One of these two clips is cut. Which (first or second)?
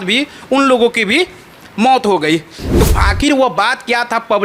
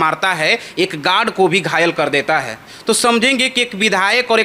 first